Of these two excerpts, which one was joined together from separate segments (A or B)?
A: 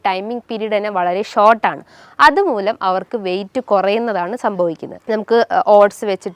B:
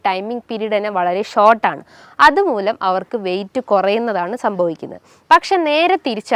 A